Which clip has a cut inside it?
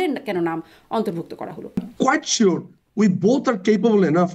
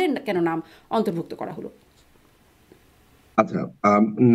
first; 1 cut; at 1.9 s

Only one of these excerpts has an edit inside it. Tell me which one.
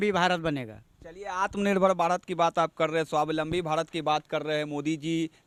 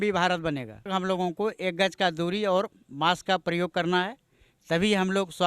second; 1 cut; at 0.9 s

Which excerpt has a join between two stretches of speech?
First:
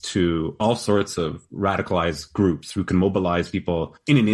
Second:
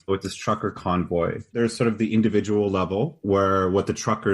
second; 1 cut; at 1.5 s

